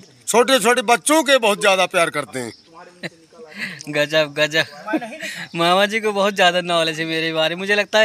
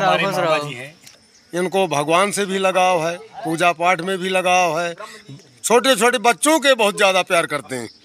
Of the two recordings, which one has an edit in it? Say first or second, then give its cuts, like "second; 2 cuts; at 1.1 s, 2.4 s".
second; 1 cut; at 1.2 s